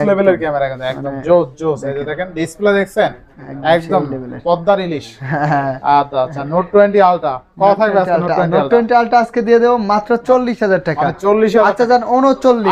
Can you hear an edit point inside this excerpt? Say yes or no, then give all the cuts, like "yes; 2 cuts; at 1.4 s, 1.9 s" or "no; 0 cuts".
no; 0 cuts